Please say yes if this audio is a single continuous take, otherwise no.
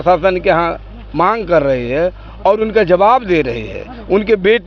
yes